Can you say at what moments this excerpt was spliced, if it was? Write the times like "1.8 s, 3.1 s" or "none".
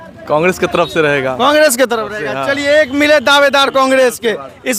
none